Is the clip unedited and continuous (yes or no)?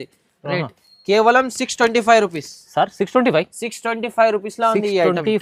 yes